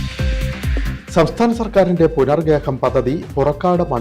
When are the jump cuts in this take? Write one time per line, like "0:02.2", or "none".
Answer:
0:01.0